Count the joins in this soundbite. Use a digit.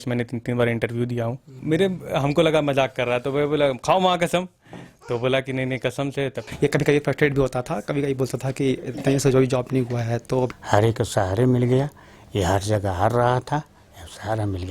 3